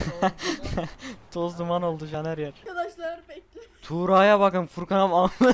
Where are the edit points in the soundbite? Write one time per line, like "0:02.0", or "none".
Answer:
0:02.1